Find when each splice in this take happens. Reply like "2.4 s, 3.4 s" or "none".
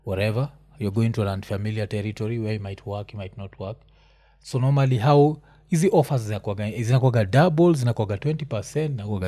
none